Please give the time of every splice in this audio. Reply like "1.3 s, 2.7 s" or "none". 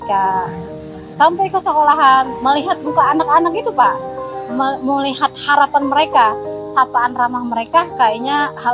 none